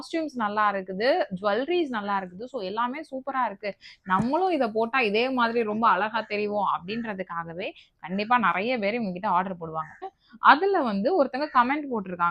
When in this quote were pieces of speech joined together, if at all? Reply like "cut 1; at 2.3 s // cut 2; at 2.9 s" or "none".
cut 1; at 10.2 s